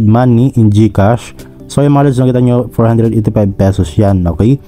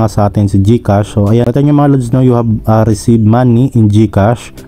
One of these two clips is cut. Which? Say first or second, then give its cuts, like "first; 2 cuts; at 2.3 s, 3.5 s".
second; 1 cut; at 1.4 s